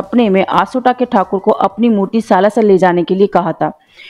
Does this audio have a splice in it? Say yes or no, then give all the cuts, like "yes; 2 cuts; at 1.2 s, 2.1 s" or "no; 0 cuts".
no; 0 cuts